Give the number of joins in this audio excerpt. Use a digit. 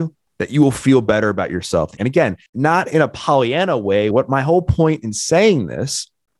2